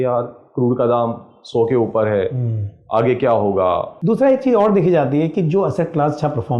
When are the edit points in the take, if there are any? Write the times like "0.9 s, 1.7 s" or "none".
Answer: 3.9 s